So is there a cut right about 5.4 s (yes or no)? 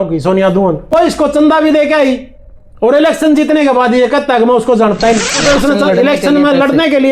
yes